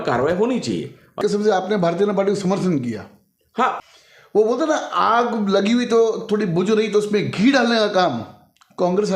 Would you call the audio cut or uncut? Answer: cut